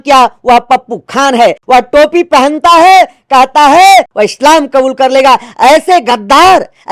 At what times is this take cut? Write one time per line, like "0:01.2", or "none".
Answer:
0:01.6
0:04.1

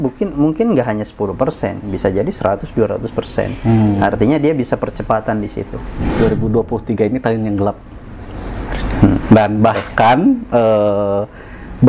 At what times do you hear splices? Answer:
0:06.0

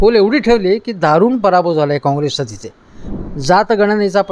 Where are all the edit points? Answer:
0:03.1

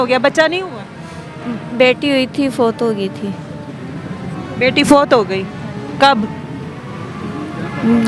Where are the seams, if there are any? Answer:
none

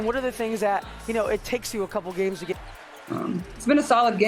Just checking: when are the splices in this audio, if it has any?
none

